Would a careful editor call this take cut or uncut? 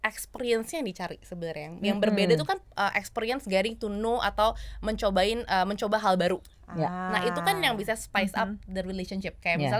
uncut